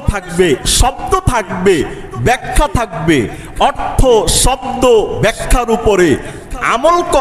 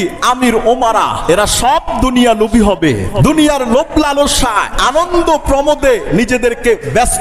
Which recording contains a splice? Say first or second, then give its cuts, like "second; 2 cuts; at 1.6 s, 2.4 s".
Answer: second; 3 cuts; at 1.2 s, 3.1 s, 4.7 s